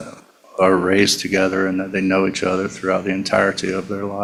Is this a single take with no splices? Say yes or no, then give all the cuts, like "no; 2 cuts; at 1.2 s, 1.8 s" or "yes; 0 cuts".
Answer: yes; 0 cuts